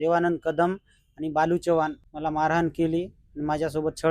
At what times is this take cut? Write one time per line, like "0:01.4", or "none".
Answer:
0:02.1